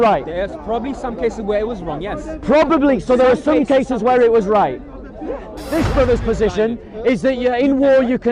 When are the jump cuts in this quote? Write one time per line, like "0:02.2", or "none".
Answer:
0:05.6